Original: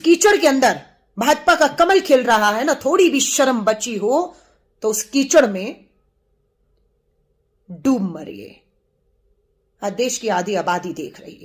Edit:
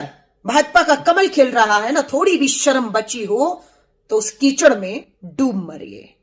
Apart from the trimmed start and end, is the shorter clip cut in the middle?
yes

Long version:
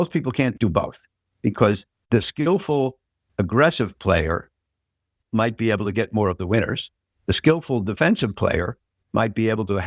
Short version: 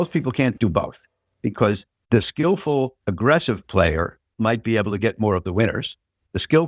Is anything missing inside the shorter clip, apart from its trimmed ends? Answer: yes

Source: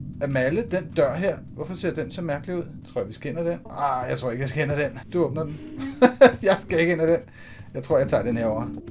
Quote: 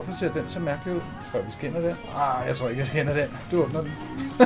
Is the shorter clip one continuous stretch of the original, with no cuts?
yes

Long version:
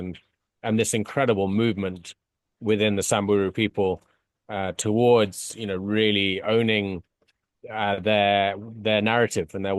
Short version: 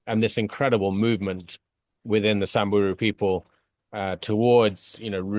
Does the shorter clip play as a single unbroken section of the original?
yes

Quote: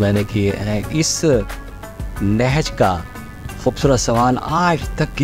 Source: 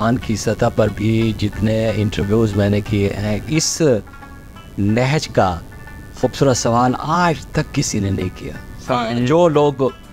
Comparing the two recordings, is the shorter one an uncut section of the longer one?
yes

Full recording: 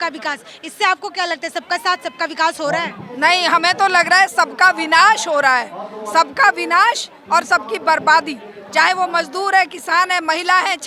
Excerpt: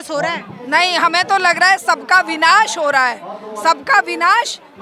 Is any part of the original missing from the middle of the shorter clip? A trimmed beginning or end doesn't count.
no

